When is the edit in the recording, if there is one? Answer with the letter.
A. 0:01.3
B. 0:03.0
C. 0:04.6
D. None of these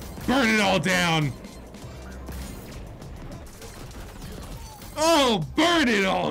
D